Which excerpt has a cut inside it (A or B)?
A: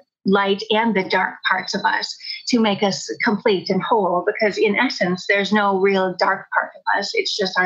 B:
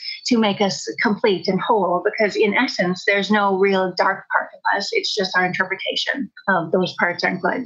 B